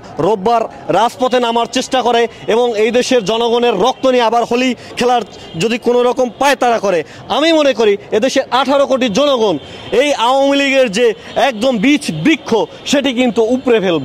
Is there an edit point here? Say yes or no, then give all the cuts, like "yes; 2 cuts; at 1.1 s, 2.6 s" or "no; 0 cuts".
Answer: no; 0 cuts